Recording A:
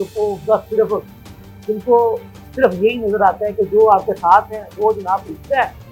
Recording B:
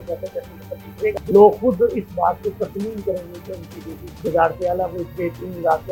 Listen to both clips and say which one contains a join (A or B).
B